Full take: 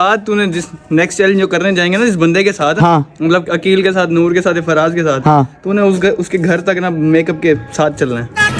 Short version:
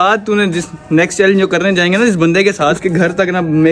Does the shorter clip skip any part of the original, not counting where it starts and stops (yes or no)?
yes